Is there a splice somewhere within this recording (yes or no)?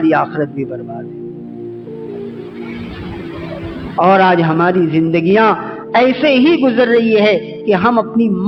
no